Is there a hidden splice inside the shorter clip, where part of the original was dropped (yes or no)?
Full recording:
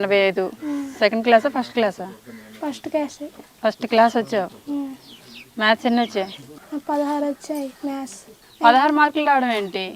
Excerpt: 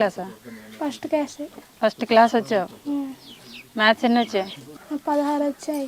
no